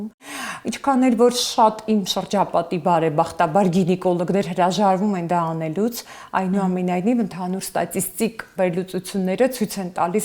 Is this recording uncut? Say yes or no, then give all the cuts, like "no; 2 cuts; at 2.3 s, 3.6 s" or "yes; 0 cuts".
yes; 0 cuts